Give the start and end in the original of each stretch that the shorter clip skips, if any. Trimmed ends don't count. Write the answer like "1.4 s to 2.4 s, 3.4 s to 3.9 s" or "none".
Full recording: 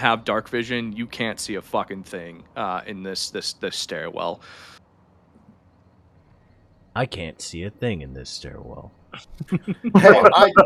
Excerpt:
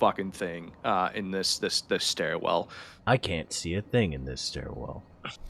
4.6 s to 6.7 s